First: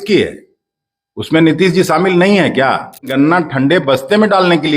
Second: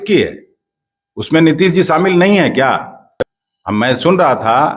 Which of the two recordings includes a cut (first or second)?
first